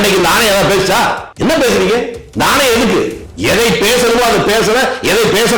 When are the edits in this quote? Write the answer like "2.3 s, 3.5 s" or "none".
1.3 s, 2.2 s, 3.2 s